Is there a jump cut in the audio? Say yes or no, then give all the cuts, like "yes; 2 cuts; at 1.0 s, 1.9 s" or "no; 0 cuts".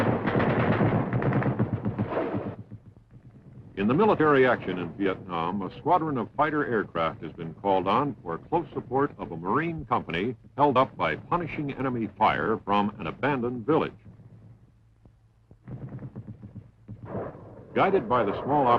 no; 0 cuts